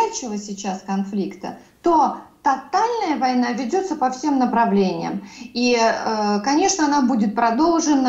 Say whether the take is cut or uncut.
uncut